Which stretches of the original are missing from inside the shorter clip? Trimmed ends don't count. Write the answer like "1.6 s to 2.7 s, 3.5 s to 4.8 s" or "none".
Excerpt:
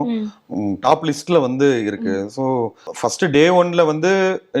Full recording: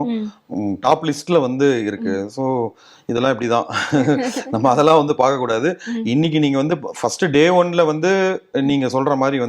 2.9 s to 6.9 s